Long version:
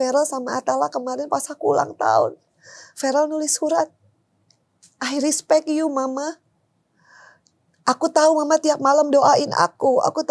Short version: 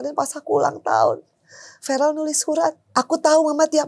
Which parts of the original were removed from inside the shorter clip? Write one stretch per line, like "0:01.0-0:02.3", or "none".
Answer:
0:04.0-0:07.7